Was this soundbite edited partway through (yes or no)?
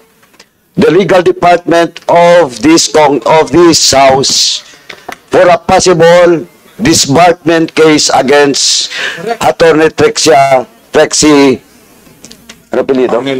no